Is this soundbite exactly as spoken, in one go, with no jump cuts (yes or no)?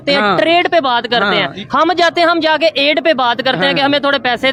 yes